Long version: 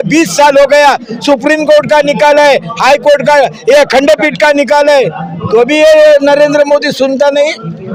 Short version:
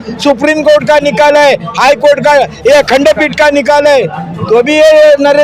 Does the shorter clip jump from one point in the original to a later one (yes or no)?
no